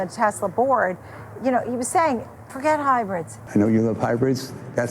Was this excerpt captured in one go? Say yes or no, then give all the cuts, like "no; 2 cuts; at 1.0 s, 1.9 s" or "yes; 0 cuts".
no; 1 cut; at 3.3 s